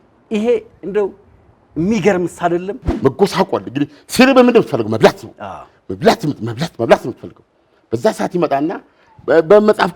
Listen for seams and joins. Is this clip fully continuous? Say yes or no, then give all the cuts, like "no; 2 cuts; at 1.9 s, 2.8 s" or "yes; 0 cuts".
no; 1 cut; at 2.8 s